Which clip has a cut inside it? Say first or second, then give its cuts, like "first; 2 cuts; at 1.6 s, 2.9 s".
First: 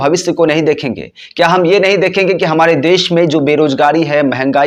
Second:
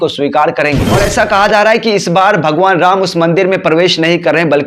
second; 1 cut; at 1.0 s